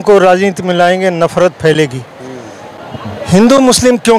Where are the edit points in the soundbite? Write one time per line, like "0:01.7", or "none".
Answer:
none